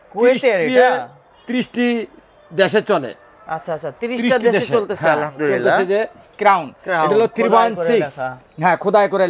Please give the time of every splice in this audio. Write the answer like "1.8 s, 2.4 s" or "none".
none